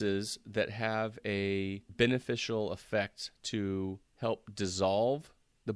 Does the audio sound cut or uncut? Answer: cut